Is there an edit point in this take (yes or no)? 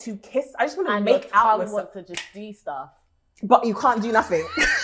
no